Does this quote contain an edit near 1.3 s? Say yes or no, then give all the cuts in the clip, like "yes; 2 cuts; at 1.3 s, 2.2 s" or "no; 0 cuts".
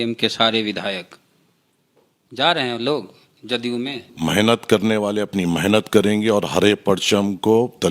no; 1 cut; at 4.0 s